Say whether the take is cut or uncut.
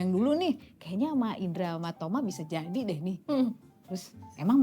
uncut